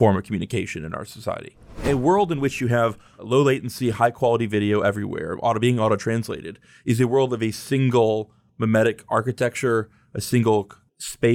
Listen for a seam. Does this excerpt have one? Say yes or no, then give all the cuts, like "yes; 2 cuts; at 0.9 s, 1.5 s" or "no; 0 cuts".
yes; 2 cuts; at 1.8 s, 3.2 s